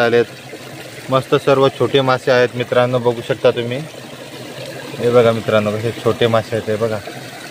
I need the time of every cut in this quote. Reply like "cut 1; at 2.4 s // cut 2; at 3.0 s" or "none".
none